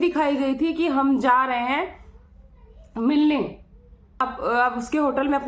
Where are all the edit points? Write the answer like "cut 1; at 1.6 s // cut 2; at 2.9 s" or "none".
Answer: cut 1; at 4.2 s